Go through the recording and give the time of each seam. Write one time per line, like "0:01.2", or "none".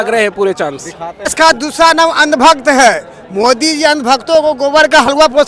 0:01.3